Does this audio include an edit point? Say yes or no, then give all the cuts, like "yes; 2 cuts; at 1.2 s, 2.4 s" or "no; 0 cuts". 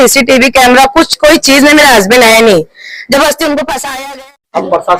yes; 1 cut; at 3.9 s